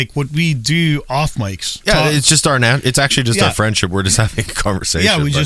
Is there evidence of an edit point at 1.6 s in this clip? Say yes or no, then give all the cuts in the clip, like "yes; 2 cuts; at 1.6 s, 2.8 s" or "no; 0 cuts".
yes; 1 cut; at 1.6 s